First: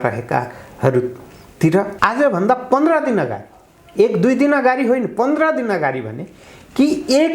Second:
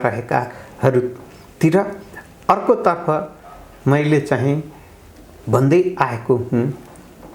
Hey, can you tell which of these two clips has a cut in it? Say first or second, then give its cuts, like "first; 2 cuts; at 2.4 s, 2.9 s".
first; 1 cut; at 1.9 s